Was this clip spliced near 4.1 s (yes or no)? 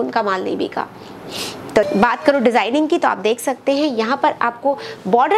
no